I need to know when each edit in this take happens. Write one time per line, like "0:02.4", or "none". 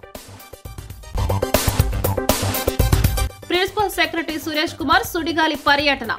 0:01.1
0:03.3